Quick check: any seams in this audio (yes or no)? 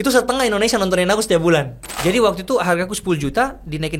yes